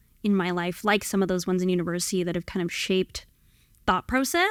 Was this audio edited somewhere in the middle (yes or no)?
no